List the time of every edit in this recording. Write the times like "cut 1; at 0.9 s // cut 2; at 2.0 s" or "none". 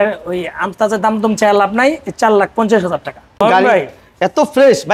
cut 1; at 3.3 s